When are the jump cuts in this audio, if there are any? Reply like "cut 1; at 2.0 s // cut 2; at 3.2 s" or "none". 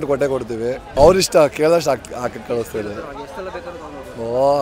cut 1; at 0.9 s